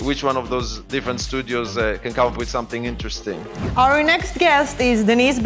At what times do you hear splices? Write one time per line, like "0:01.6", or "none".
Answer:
0:03.5